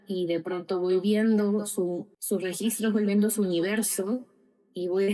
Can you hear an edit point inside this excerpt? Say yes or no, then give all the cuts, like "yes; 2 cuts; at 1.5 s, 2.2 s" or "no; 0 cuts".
yes; 1 cut; at 2.1 s